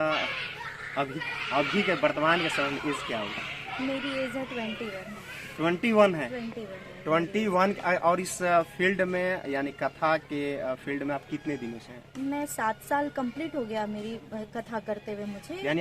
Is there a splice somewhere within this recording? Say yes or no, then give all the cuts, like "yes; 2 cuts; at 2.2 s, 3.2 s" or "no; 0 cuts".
no; 0 cuts